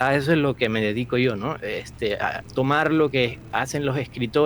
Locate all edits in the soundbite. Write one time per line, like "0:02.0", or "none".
none